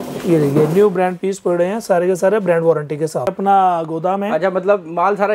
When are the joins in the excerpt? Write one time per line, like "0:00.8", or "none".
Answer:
0:03.3

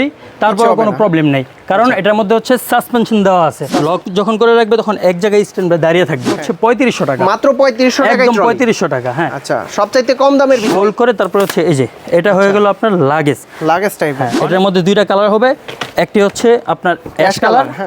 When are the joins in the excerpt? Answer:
0:03.6
0:06.3
0:10.7
0:14.3

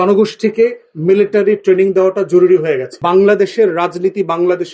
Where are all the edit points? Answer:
0:02.9

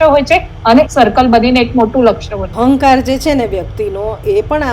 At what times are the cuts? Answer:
0:00.9
0:02.5

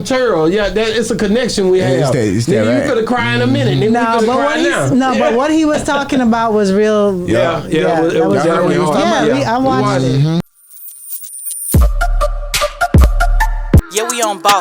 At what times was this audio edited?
0:10.4

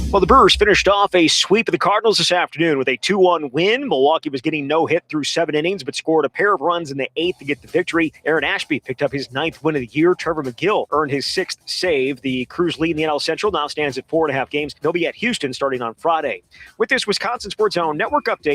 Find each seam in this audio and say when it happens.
0:08.2
0:10.9
0:14.7
0:17.5

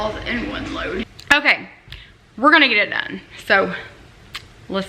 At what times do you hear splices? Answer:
0:01.2

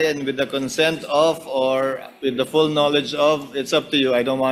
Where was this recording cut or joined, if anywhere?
none

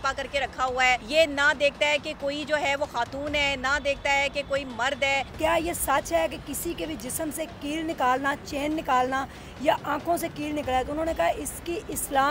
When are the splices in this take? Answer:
0:01.0
0:05.3

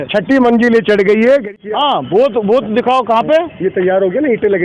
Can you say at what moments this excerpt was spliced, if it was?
0:01.6

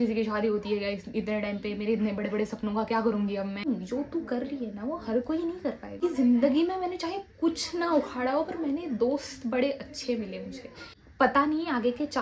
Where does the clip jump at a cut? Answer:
0:03.6
0:06.0
0:11.0

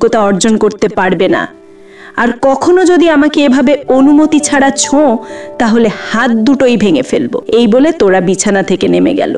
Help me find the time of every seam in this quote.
0:07.4

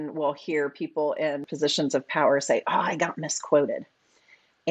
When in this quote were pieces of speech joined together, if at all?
0:01.5

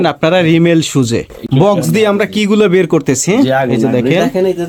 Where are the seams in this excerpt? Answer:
none

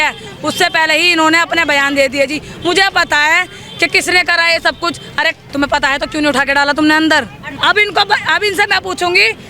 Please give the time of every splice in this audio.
0:07.4

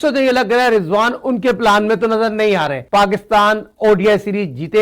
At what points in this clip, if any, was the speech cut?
0:02.8

